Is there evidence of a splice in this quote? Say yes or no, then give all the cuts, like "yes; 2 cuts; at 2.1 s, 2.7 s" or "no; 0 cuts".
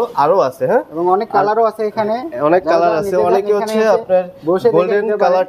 no; 0 cuts